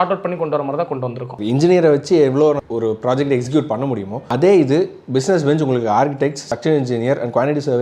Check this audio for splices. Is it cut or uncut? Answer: cut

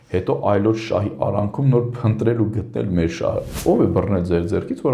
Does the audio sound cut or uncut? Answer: cut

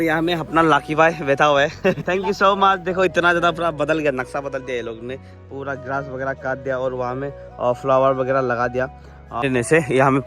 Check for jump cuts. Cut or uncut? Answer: cut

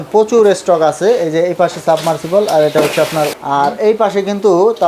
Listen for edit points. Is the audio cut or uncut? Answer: uncut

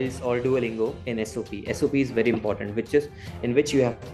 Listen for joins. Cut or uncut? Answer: cut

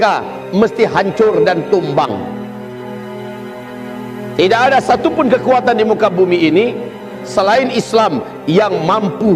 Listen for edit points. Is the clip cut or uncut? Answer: cut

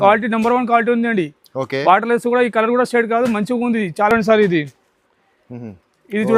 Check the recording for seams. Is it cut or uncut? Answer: uncut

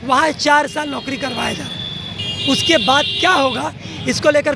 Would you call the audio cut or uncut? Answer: uncut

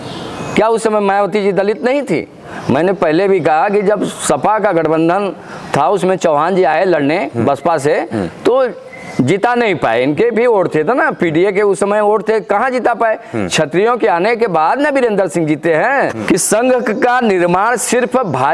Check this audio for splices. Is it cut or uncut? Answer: cut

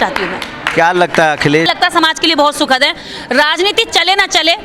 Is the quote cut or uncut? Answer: cut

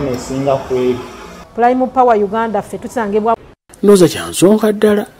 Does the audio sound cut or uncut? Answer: cut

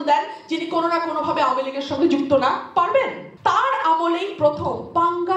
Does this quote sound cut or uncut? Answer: cut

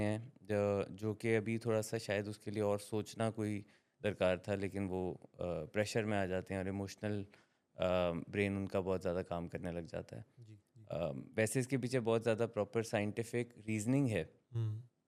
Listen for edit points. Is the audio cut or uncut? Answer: uncut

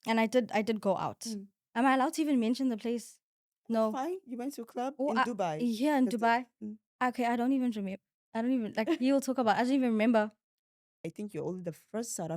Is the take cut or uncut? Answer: cut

